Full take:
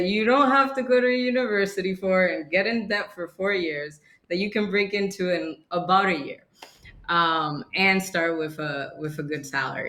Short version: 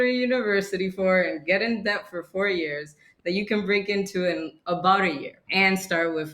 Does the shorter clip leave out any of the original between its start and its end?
yes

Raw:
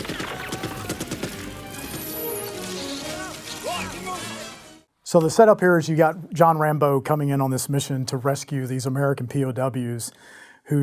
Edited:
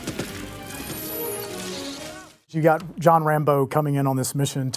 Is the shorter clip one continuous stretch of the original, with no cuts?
no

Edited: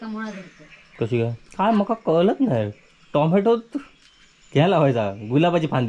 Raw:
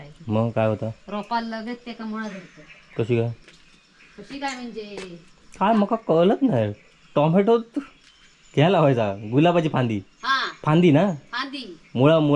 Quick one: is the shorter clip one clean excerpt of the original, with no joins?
no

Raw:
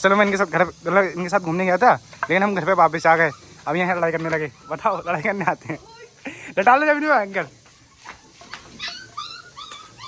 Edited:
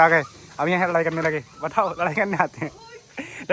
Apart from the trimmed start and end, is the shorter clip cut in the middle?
no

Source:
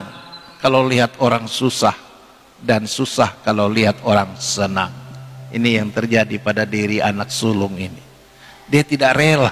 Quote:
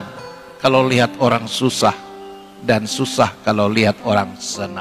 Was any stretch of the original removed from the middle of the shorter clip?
no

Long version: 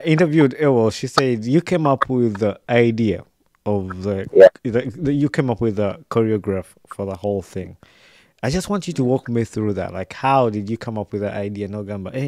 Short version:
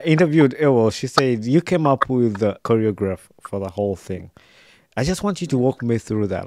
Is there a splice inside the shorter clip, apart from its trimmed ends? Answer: yes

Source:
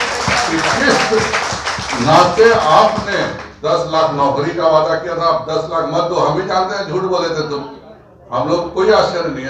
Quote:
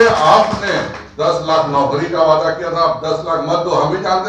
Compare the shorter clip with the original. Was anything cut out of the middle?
no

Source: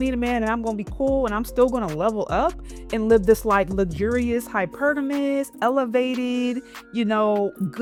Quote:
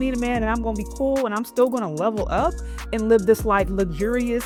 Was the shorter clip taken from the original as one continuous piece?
yes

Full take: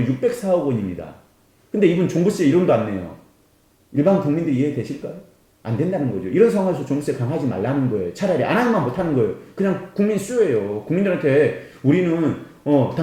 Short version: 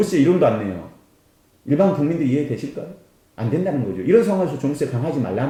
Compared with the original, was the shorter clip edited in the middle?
no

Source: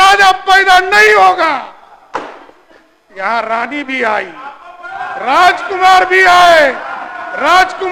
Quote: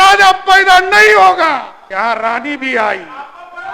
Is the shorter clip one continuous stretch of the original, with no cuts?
no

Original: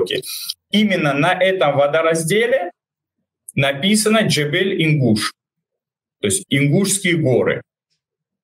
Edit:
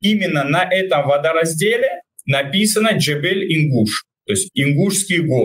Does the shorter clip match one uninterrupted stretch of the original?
no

